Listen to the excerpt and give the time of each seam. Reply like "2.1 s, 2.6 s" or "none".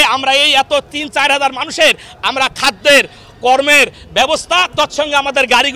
none